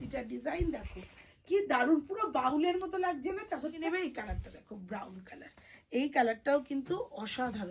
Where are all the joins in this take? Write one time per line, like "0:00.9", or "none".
0:03.8

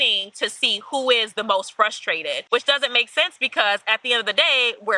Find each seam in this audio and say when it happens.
0:02.4

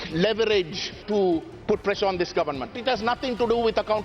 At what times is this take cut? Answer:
0:01.0
0:02.7

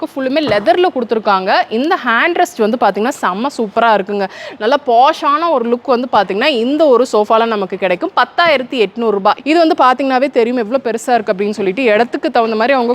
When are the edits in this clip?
0:09.4

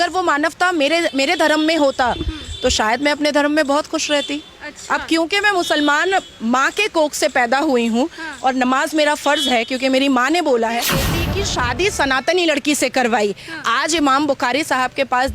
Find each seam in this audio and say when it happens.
0:11.1

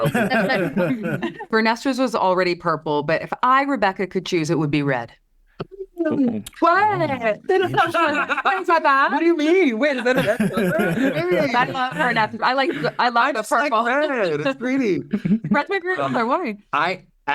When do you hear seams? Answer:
0:01.4

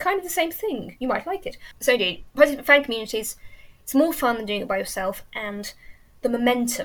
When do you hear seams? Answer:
0:01.6

